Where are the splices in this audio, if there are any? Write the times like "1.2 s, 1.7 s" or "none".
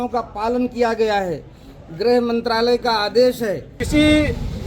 3.7 s